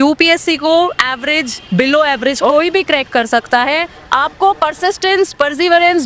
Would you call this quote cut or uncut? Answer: uncut